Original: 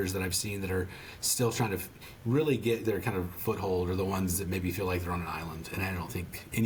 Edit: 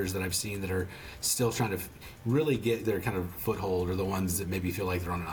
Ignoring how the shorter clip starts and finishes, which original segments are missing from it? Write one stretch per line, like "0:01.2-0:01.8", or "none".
none